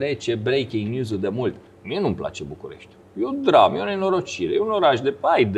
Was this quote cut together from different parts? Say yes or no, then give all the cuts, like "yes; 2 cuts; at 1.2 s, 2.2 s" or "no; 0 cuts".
yes; 1 cut; at 1.7 s